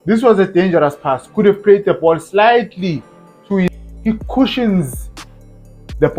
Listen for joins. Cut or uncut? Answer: cut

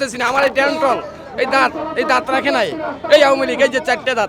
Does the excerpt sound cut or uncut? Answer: uncut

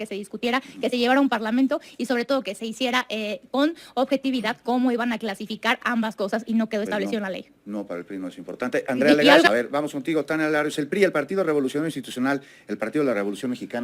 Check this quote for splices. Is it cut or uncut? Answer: cut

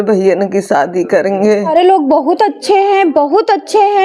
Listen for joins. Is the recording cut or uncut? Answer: cut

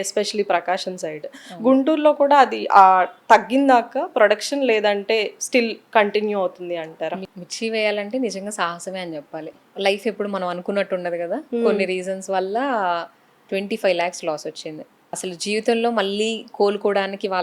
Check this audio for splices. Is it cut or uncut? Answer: cut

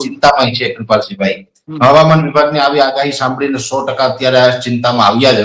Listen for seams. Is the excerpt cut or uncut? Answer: uncut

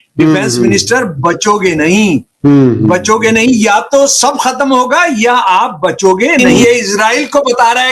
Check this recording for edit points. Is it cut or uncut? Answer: cut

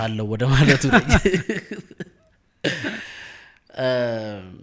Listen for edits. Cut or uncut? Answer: uncut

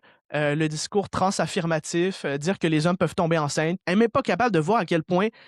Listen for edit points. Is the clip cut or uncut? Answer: cut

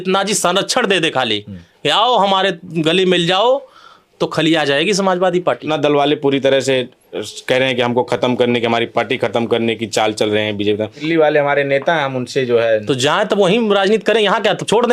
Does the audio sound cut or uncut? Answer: cut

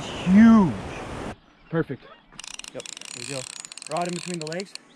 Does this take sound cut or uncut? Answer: cut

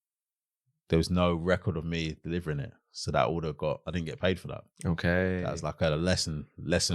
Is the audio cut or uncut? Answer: uncut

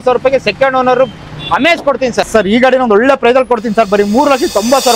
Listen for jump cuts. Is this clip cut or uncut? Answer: cut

